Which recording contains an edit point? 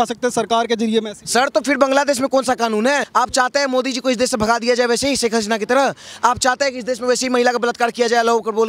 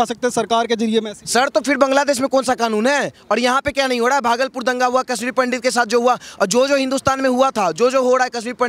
first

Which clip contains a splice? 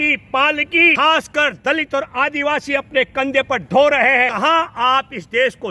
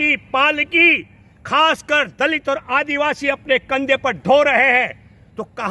first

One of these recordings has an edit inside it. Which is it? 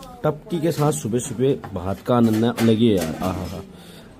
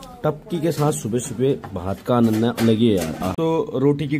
second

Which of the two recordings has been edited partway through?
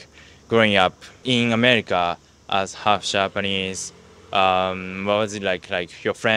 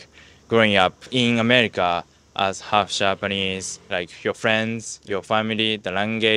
second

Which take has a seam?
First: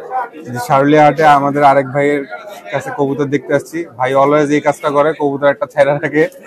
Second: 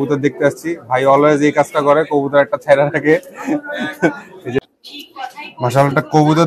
second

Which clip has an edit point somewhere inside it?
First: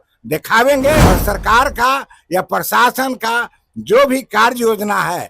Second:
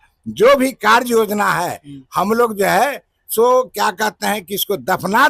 first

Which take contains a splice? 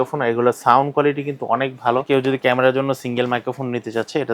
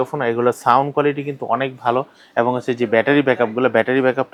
first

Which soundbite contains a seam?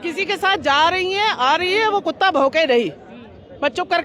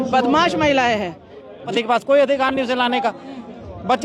second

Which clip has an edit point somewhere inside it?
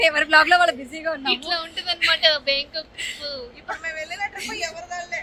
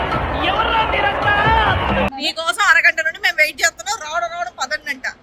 second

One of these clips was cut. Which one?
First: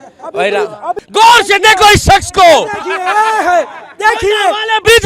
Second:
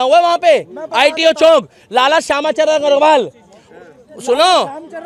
first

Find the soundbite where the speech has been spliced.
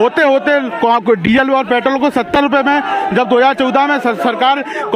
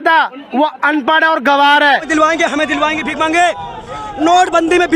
second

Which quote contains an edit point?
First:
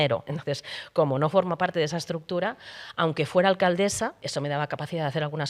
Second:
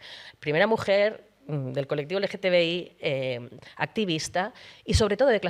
first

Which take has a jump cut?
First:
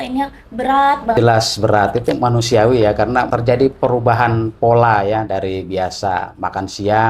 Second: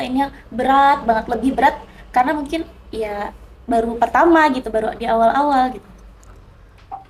first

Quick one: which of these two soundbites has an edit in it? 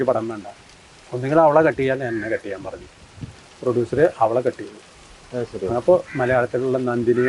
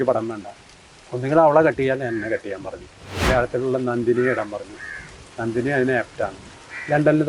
second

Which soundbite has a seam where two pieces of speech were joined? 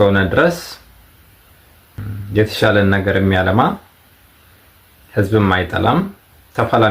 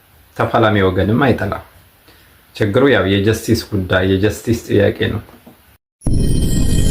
second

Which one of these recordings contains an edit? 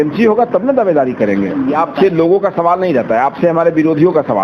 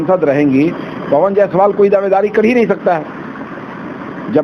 first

